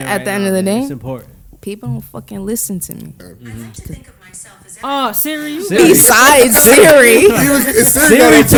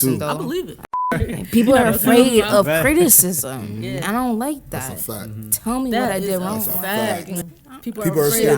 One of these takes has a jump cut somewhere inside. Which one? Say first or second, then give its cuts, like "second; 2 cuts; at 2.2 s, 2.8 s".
second; 2 cuts; at 1.1 s, 7.5 s